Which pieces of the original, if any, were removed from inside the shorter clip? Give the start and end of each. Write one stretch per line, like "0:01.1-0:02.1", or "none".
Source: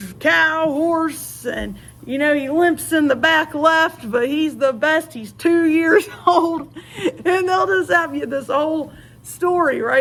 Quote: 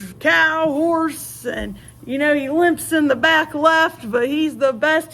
none